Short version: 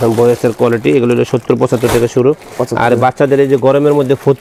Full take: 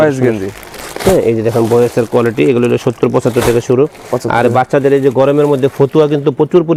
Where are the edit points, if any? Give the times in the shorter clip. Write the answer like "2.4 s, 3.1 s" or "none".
none